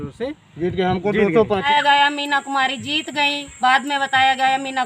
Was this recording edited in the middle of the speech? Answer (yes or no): yes